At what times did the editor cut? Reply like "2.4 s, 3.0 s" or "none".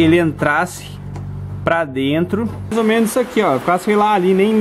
2.7 s